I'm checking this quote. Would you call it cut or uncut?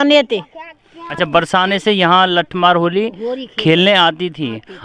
uncut